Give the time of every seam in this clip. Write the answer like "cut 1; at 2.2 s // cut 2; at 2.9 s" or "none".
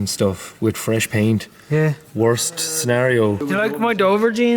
cut 1; at 3.4 s